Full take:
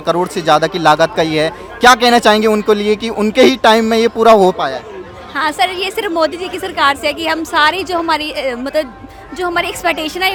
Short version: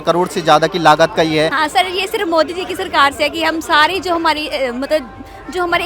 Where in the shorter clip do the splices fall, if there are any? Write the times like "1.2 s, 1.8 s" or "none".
1.6 s